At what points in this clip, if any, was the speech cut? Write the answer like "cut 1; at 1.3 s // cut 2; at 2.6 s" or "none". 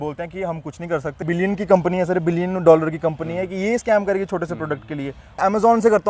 cut 1; at 1.2 s // cut 2; at 5.4 s